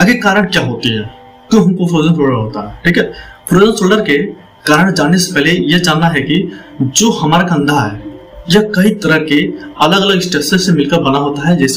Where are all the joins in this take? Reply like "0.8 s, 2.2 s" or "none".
none